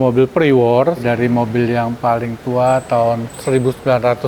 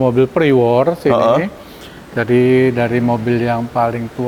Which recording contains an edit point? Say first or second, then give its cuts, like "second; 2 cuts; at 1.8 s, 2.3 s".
first; 2 cuts; at 1.0 s, 3.3 s